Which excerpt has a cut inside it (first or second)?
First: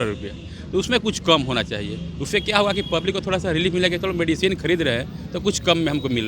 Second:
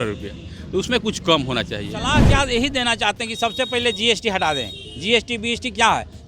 second